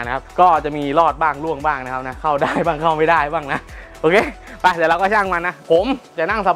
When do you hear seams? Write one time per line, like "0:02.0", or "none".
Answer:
0:05.5